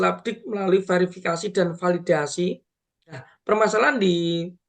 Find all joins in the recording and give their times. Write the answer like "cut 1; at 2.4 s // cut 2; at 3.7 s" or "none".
cut 1; at 3.3 s